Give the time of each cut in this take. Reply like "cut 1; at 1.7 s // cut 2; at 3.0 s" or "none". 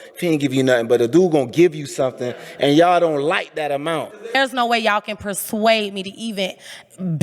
cut 1; at 4.4 s